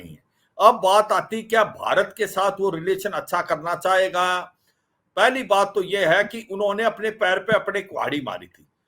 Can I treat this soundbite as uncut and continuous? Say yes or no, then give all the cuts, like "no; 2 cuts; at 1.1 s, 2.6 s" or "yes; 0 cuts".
yes; 0 cuts